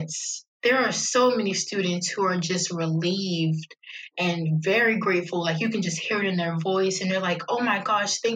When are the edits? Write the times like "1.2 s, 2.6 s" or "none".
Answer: none